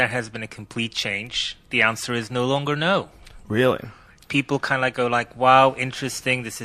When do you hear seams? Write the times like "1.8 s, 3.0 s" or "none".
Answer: 3.0 s